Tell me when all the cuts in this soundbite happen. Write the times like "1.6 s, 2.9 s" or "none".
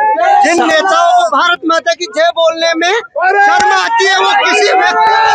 none

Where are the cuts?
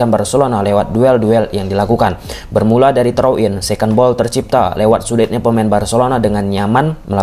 none

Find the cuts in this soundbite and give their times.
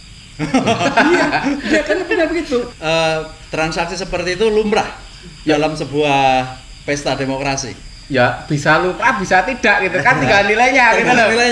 2.7 s

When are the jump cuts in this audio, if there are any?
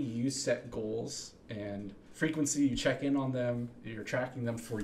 2.0 s

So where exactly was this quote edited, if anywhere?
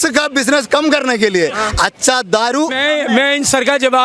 2.8 s

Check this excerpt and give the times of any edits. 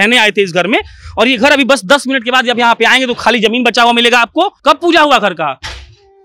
4.6 s

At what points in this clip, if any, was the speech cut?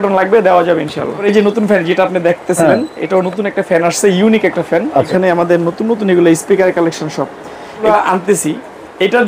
1.2 s, 5.1 s, 7.8 s

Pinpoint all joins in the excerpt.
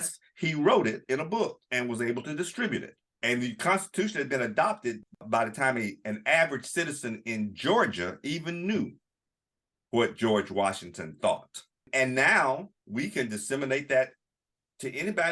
none

